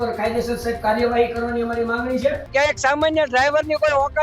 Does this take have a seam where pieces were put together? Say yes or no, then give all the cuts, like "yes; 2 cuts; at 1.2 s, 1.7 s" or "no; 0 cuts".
yes; 1 cut; at 2.4 s